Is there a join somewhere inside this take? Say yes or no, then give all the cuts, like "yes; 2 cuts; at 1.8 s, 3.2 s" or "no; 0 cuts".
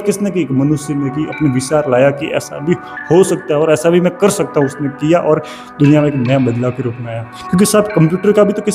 no; 0 cuts